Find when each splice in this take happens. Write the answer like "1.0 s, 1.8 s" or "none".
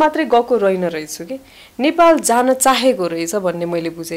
none